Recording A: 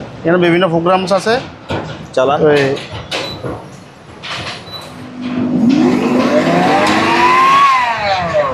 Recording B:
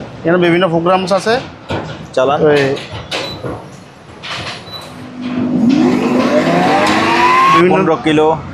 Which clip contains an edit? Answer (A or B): B